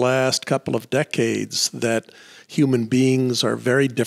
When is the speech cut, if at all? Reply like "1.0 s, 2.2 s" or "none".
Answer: none